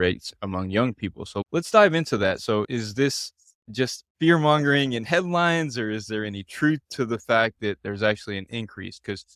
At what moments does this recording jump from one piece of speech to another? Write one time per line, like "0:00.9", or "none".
none